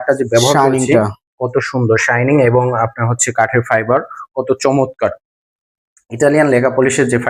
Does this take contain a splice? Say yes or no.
no